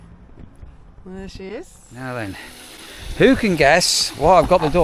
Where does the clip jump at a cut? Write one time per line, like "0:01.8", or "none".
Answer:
0:01.8

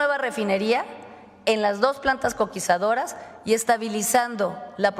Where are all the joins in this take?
none

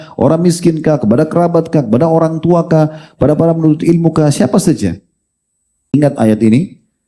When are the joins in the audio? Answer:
0:05.9

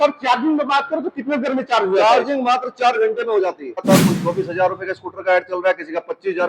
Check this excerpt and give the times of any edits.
0:03.8

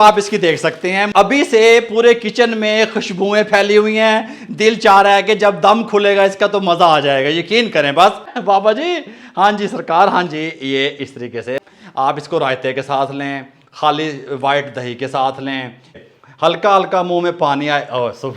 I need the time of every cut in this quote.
0:01.1
0:08.3
0:11.6
0:16.0

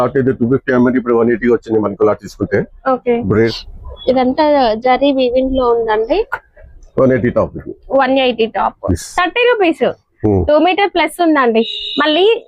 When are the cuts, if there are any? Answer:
0:03.6
0:08.9

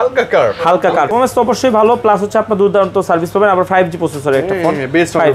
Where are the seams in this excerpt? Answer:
0:01.1

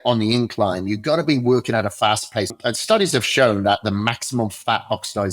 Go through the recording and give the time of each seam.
0:02.5

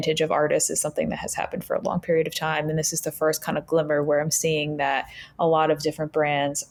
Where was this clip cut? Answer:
none

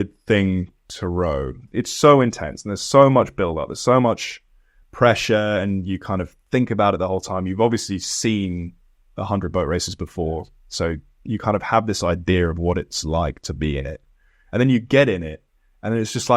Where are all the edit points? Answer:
0:01.6

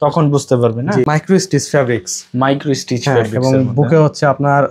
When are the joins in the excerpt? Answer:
0:01.1

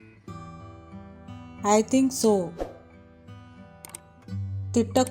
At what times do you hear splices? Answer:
0:02.5
0:04.0

